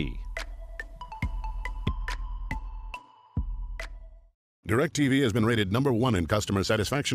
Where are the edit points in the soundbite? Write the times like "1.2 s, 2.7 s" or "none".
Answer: 4.5 s